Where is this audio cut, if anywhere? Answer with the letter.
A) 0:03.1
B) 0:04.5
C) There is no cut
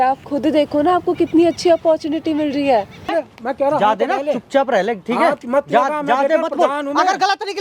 A